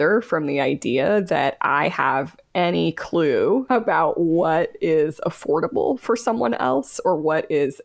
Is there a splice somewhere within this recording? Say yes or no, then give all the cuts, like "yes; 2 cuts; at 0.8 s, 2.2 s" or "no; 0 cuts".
yes; 1 cut; at 3.7 s